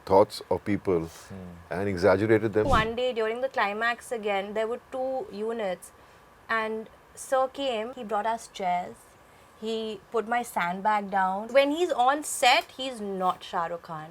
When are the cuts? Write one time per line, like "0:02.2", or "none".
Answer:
0:02.7
0:11.4